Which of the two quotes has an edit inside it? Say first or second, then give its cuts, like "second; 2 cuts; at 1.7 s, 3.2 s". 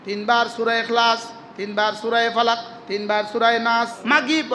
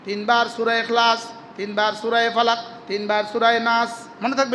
first; 1 cut; at 3.6 s